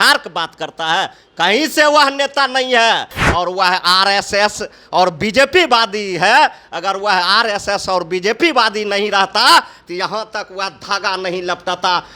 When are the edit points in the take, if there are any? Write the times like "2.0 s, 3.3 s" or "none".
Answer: 3.2 s